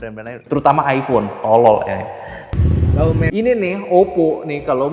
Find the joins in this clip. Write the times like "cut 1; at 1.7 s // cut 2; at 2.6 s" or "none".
cut 1; at 3.3 s

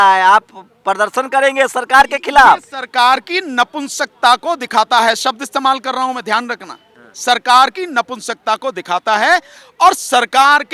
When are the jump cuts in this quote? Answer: none

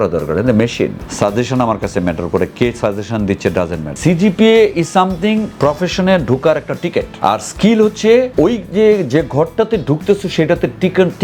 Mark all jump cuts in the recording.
cut 1; at 1.0 s // cut 2; at 3.9 s // cut 3; at 5.5 s // cut 4; at 7.1 s // cut 5; at 8.3 s

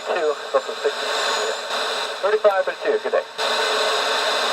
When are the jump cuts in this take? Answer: cut 1; at 2.0 s

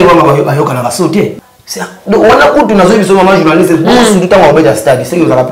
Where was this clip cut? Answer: cut 1; at 1.4 s

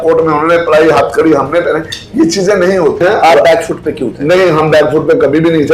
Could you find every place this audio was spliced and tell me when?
cut 1; at 3.0 s

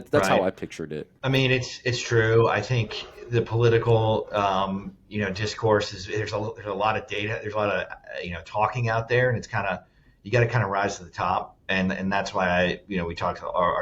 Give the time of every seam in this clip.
cut 1; at 1.1 s

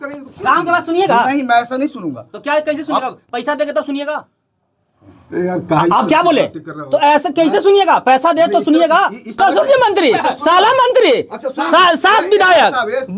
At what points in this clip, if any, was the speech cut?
cut 1; at 9.4 s

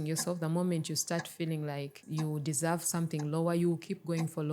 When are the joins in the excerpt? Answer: cut 1; at 2.0 s

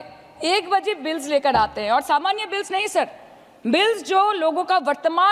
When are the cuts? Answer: none

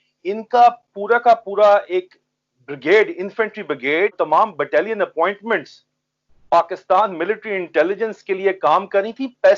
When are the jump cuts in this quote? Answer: cut 1; at 4.1 s

